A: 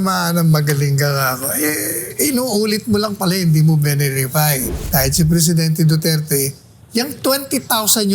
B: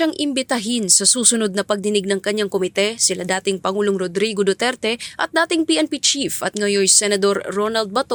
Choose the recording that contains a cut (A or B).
A